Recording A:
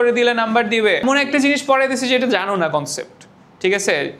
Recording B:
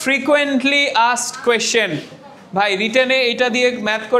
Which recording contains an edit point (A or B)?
A